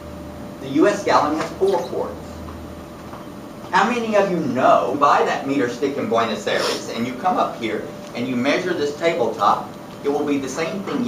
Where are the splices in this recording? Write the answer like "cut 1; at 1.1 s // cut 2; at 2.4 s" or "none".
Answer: none